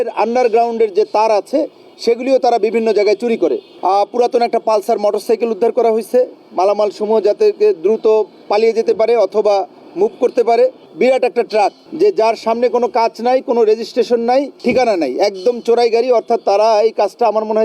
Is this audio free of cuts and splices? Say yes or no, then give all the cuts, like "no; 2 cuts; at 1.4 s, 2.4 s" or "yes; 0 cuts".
no; 4 cuts; at 3.7 s, 10.8 s, 11.8 s, 14.5 s